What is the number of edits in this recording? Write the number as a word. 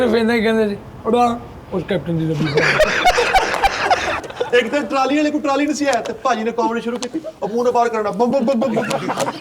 one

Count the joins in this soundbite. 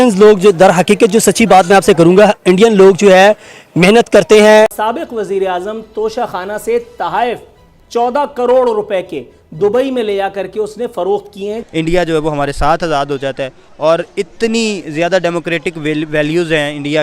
two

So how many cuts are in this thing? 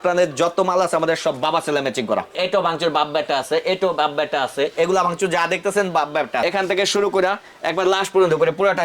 two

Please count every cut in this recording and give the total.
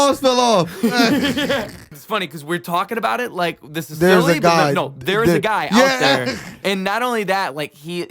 two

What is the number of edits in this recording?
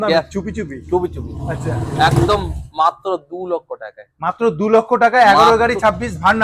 zero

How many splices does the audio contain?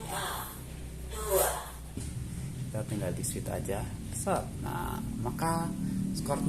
one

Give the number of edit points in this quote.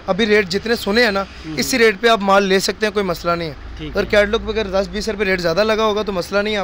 zero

